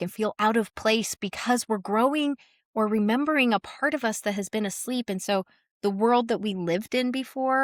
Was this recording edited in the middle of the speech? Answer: no; 0 cuts

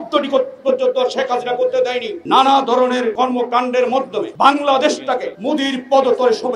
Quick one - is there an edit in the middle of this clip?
yes; 4 cuts; at 2.1 s, 3.1 s, 4.3 s, 5.3 s

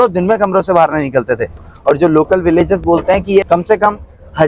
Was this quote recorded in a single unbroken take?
no; 2 cuts; at 1.6 s, 3.5 s

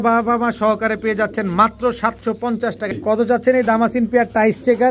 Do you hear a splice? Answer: yes; 1 cut; at 3.0 s

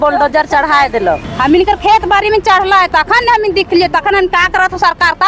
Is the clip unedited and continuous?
no; 1 cut; at 1.2 s

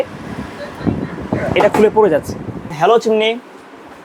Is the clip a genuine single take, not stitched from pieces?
no; 1 cut; at 2.7 s

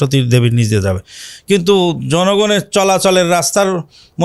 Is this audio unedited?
yes; 0 cuts

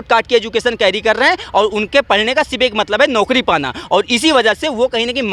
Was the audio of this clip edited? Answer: no; 0 cuts

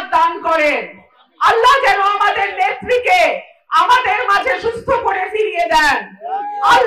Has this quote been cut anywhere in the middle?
no; 0 cuts

